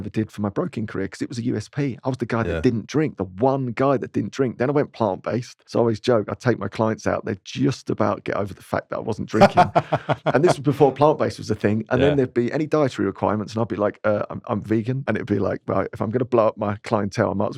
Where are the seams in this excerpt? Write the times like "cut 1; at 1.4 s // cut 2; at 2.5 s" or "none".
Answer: cut 1; at 5.6 s // cut 2; at 15.0 s